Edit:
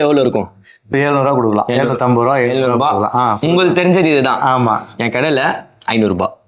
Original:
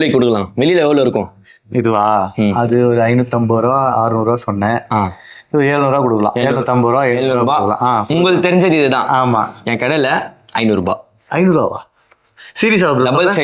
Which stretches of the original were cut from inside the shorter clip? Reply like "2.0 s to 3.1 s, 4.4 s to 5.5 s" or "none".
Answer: 1.7 s to 5.6 s

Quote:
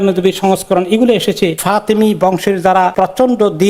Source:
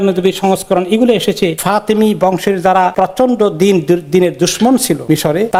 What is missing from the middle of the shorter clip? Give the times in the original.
none

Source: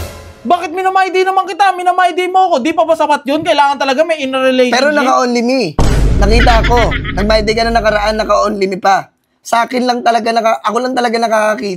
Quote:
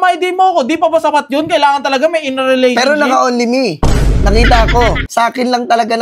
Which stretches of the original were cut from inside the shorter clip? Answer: 7.0 s to 9.4 s

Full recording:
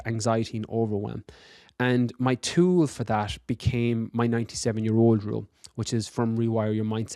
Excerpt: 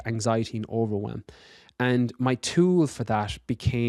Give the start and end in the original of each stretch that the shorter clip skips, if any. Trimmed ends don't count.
none

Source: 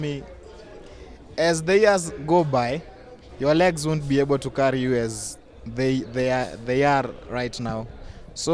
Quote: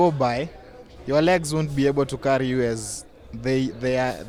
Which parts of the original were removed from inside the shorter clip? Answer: none

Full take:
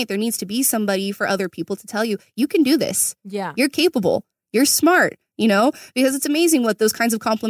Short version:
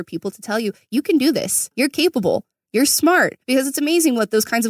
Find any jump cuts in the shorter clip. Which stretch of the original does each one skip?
3.1 s to 3.4 s, 5.2 s to 5.9 s

